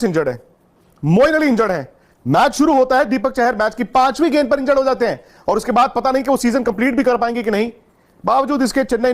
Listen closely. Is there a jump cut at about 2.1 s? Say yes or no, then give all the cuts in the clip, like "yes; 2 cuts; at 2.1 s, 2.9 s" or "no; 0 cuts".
no; 0 cuts